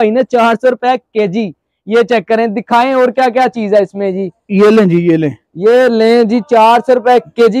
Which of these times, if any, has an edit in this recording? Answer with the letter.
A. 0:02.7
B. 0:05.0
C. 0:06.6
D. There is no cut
D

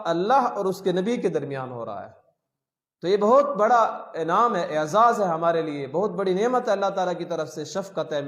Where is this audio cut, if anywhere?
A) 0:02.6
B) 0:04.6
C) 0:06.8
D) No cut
D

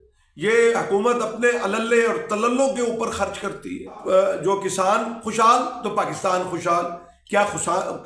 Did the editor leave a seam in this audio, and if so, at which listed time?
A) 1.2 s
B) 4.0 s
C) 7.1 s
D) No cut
B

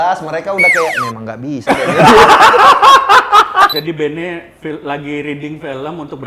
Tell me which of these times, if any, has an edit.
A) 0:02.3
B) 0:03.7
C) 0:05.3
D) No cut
B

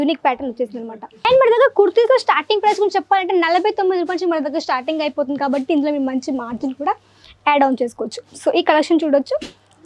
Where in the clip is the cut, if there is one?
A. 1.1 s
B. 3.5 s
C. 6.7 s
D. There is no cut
A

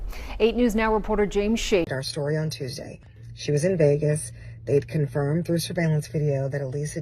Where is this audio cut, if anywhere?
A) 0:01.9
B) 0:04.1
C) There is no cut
A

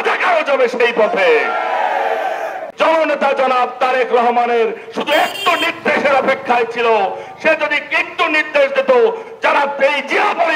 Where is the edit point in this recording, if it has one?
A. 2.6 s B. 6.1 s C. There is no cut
A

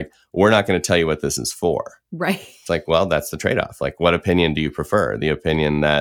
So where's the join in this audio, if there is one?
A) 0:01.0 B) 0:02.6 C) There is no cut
B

